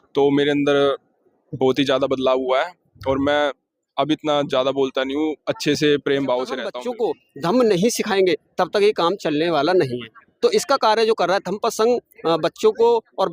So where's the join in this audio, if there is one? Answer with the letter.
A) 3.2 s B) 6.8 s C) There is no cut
B